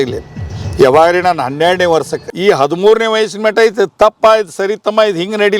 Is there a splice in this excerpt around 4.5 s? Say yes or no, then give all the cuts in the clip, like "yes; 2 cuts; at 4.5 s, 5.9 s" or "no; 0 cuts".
no; 1 cut; at 2.2 s